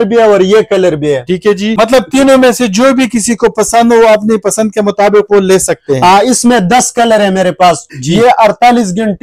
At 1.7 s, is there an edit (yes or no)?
yes